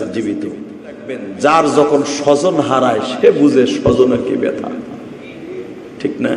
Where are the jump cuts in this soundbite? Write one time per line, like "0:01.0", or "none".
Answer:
0:01.3